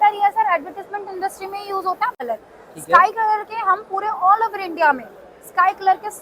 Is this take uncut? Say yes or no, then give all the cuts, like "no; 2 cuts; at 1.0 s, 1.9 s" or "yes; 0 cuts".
no; 1 cut; at 2.2 s